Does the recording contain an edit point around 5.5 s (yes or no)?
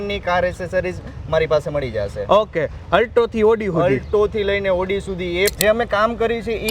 yes